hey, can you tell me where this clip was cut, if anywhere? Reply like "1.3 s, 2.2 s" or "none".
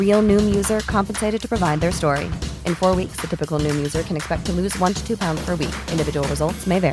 none